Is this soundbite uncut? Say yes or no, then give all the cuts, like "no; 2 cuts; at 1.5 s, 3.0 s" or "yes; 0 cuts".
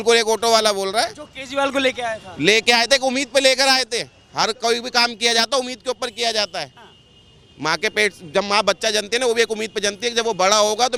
yes; 0 cuts